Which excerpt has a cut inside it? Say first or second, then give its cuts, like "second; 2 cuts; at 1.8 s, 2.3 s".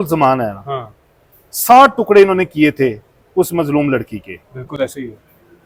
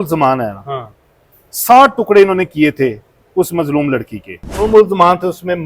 second; 1 cut; at 4.6 s